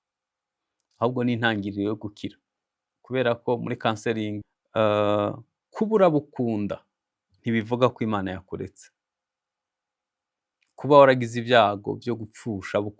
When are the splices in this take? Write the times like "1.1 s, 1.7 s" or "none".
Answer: 4.4 s